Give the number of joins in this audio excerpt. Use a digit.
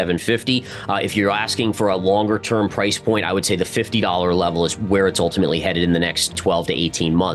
1